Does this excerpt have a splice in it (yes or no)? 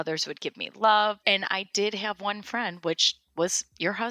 yes